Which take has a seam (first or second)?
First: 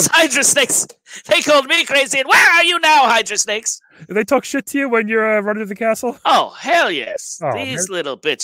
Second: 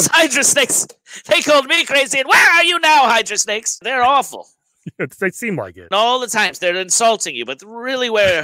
second